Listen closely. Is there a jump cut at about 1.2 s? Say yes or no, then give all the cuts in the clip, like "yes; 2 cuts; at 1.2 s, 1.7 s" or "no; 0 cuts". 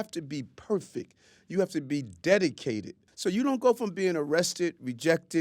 no; 1 cut; at 3.0 s